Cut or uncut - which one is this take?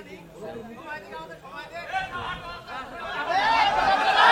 uncut